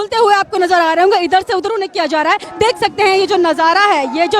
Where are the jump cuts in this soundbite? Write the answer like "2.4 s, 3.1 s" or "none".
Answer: 2.5 s